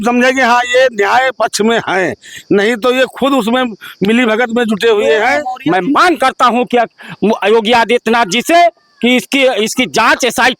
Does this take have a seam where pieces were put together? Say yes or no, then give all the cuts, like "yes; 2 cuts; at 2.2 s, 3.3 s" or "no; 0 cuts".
yes; 1 cut; at 5.5 s